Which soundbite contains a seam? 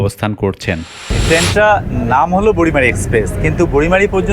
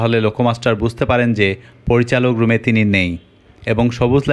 first; 1 cut; at 1.1 s

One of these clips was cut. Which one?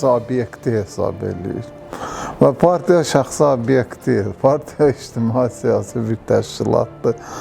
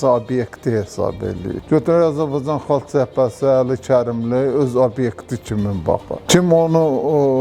second; 2 cuts; at 1.6 s, 6.1 s

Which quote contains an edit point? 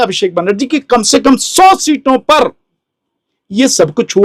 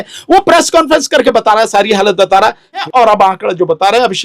second; 1 cut; at 2.8 s

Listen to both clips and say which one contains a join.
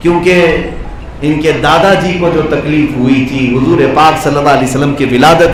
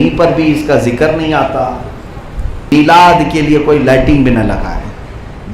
second; 1 cut; at 2.7 s

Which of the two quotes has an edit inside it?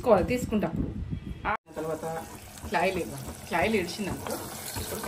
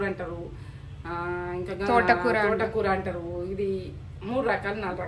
first; 1 cut; at 1.5 s

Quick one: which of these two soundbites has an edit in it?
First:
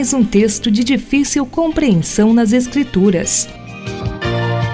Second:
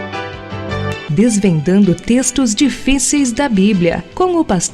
first; 1 cut; at 3.4 s

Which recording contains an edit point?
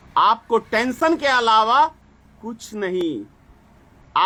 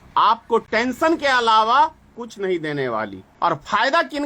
second; 2 cuts; at 2.2 s, 3.2 s

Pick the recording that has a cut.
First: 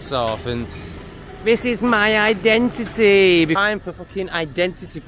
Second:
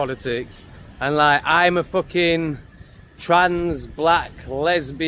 first; 1 cut; at 3.6 s

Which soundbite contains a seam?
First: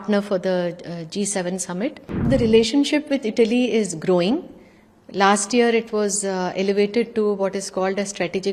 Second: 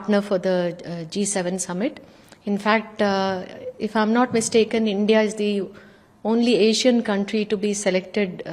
first; 1 cut; at 2.3 s

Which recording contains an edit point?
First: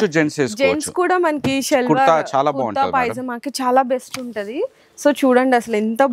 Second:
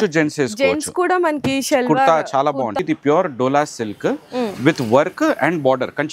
second; 1 cut; at 2.8 s

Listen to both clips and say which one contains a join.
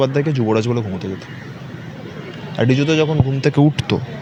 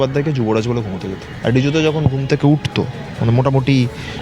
second; 2 cuts; at 1.3 s, 3.0 s

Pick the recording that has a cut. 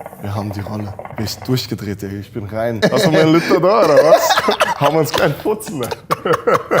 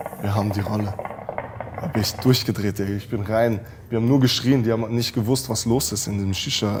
first; 2 cuts; at 1.1 s, 2.8 s

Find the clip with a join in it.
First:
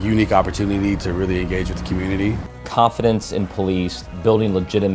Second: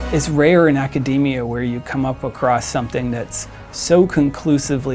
first; 2 cuts; at 2.5 s, 4.0 s

